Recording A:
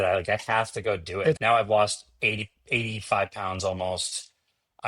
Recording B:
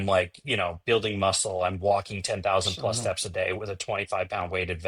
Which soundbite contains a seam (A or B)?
A